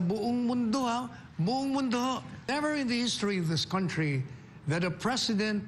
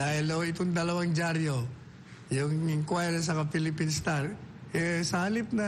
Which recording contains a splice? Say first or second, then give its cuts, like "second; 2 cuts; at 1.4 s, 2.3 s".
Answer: first; 1 cut; at 2.5 s